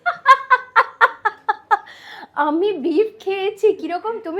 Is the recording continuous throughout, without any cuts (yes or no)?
yes